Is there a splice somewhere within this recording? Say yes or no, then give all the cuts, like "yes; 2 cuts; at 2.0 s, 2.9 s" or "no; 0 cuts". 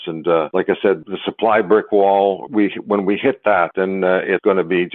yes; 3 cuts; at 0.8 s, 2.4 s, 4.0 s